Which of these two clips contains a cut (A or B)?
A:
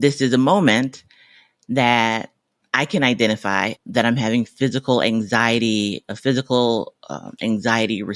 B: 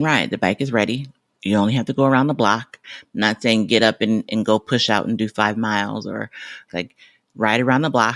B